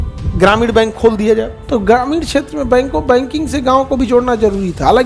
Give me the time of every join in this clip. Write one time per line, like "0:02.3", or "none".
0:01.6